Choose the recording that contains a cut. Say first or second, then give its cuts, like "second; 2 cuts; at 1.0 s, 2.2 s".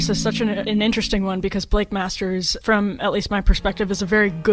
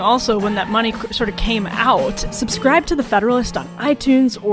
second; 1 cut; at 2.2 s